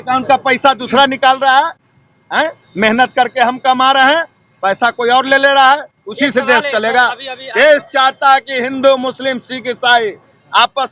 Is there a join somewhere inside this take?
no; 0 cuts

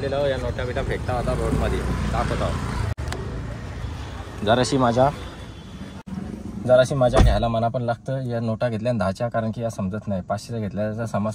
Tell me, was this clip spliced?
no; 0 cuts

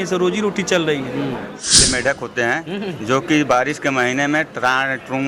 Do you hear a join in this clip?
yes; 1 cut; at 1.8 s

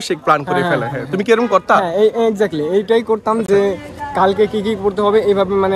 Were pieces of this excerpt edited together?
no; 0 cuts

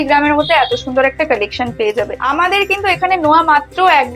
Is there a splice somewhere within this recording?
yes; 1 cut; at 2.2 s

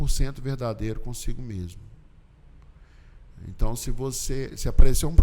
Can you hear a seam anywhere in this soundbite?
no; 0 cuts

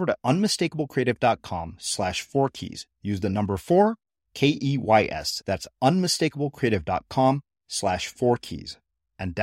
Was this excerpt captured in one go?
yes; 0 cuts

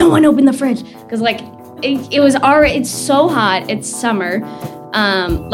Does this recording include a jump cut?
no; 0 cuts

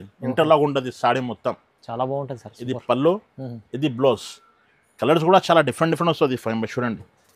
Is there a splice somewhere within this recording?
no; 0 cuts

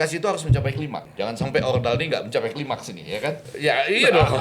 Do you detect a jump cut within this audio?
yes; 2 cuts; at 1.0 s, 3.5 s

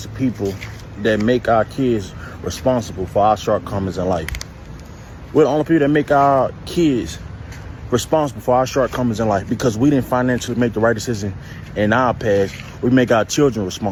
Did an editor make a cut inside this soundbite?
no; 0 cuts

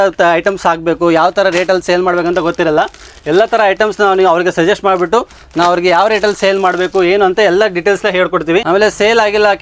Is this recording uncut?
yes; 0 cuts

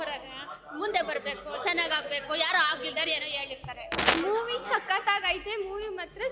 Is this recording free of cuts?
no; 1 cut; at 4.1 s

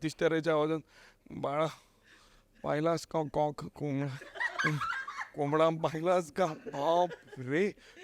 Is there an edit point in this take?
no; 0 cuts

